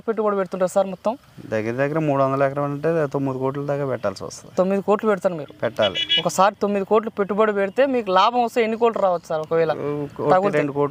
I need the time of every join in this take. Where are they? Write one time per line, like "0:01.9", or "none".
none